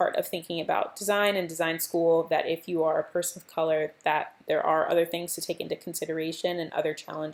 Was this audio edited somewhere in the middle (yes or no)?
no